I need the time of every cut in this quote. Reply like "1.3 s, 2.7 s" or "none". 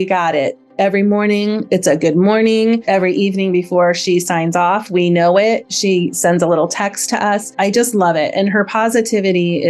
2.8 s, 7.5 s